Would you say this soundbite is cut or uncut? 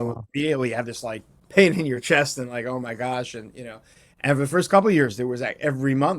cut